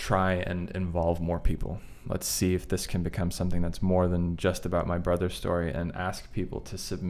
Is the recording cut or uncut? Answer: uncut